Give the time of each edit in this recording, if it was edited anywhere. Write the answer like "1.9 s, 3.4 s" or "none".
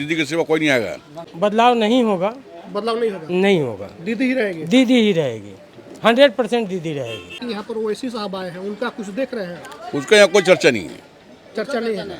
1.2 s, 7.4 s